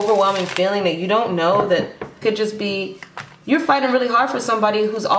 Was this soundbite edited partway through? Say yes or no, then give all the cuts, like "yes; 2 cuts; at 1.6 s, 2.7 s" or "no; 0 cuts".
yes; 1 cut; at 2.2 s